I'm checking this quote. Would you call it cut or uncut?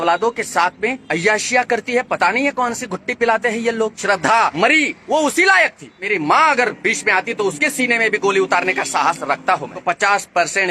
cut